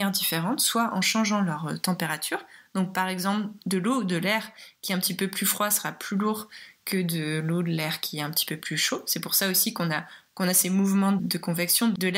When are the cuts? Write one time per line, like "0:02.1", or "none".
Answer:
none